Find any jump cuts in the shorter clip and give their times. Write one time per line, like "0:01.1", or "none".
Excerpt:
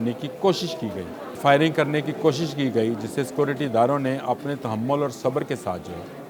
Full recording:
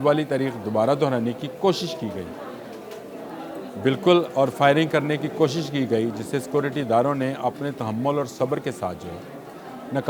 0:01.4